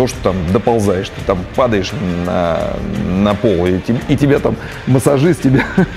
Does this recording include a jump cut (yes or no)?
no